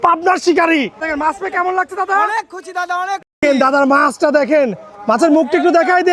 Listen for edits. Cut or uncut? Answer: cut